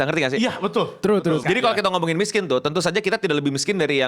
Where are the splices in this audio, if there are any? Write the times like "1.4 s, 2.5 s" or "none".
1.4 s